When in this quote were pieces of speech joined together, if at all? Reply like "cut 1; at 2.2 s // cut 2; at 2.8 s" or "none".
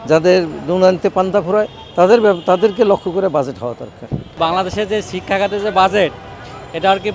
cut 1; at 4.3 s